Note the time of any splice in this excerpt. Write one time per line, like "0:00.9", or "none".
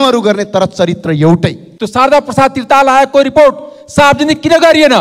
0:01.7